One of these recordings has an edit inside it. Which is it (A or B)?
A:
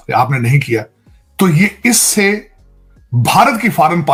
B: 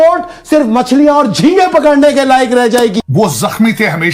B